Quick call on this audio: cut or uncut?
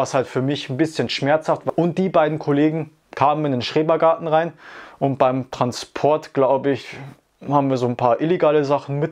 cut